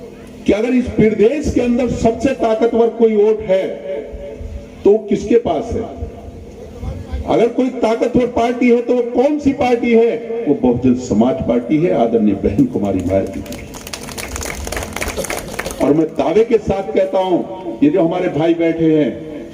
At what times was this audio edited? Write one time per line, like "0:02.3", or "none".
none